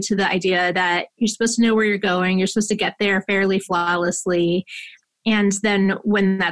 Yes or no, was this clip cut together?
no